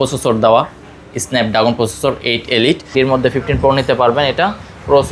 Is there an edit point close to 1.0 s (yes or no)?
no